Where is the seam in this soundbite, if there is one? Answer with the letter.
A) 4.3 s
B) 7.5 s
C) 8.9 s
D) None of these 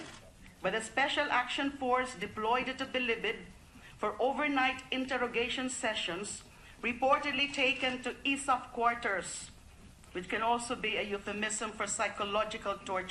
C